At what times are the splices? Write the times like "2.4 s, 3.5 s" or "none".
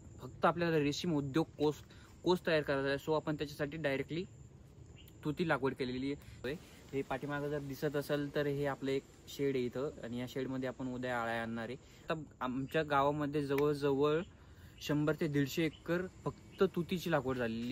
6.3 s, 12.1 s